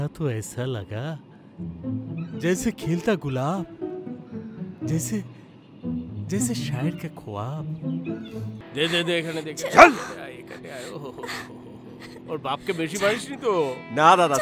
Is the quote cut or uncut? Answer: cut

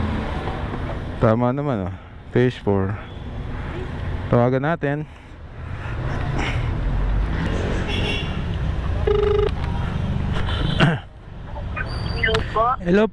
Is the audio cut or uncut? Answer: uncut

